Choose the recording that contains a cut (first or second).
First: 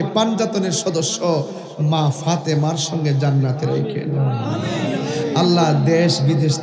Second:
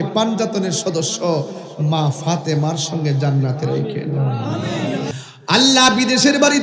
second